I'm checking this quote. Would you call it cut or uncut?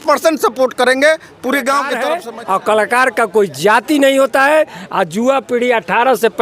cut